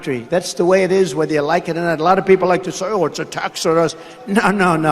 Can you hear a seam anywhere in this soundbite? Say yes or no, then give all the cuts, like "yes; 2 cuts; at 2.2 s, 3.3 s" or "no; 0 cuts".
no; 0 cuts